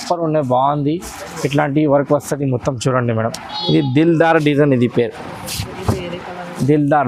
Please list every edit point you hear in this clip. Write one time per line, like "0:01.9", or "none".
0:03.5